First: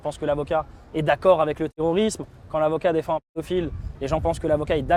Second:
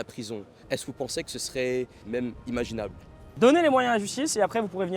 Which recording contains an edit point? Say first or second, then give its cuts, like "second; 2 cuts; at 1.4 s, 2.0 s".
second; 2 cuts; at 2.0 s, 3.2 s